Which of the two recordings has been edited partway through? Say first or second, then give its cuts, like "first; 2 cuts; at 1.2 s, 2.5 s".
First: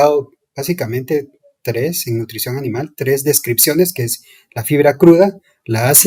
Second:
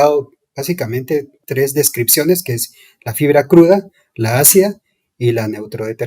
second; 1 cut; at 1.4 s